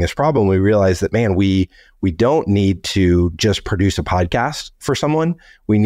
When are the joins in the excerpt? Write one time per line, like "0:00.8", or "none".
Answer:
none